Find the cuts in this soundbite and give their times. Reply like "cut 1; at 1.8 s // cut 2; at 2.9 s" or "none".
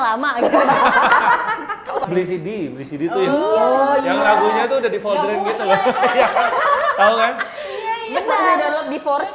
cut 1; at 2.0 s